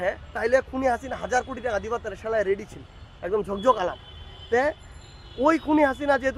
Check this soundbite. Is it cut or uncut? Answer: uncut